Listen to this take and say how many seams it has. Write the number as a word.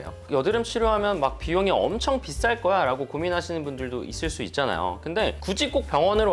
one